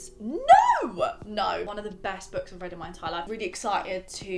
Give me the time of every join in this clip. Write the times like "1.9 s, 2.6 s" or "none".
1.6 s, 3.3 s